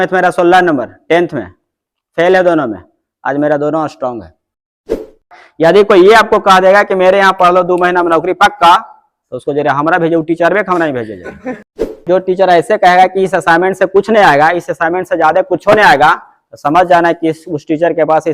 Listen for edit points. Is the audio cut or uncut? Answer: cut